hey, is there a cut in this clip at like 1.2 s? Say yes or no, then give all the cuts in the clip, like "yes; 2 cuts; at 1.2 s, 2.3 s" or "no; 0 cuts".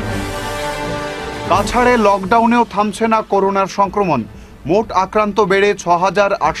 yes; 1 cut; at 1.2 s